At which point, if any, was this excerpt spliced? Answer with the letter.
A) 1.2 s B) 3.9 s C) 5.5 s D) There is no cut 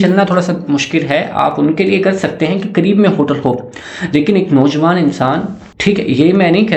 D